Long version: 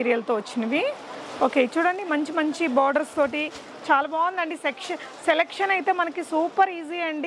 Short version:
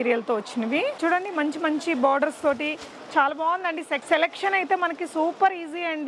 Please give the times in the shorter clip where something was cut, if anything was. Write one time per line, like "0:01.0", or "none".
0:01.0
0:04.0